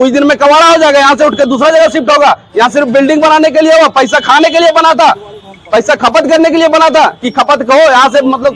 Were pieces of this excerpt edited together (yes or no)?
no